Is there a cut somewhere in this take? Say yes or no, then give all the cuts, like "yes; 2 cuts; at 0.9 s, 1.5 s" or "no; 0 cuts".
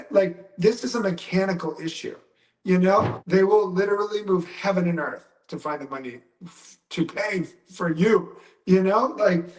yes; 1 cut; at 3.2 s